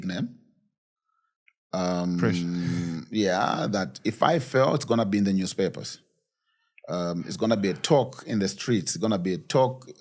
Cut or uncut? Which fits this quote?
uncut